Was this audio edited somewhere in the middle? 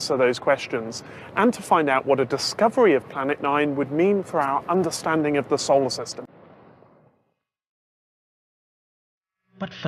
no; 0 cuts

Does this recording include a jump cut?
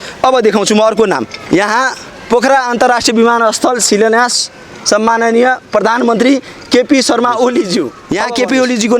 yes; 1 cut; at 8.1 s

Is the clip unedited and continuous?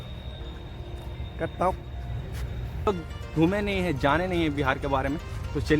no; 1 cut; at 2.9 s

